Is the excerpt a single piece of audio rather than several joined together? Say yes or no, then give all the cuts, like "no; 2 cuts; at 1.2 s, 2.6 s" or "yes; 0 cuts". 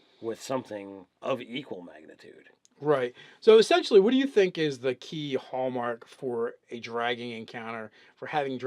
yes; 0 cuts